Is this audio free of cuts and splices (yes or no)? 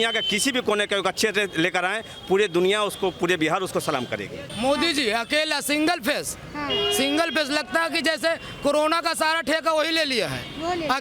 no